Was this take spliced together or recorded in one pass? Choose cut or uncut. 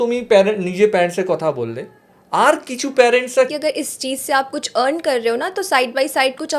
cut